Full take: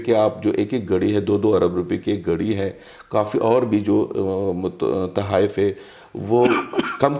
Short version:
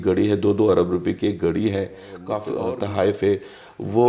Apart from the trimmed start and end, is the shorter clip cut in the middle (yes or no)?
yes